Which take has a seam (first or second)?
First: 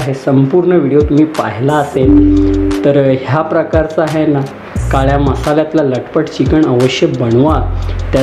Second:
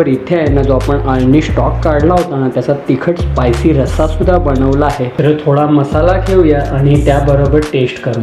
second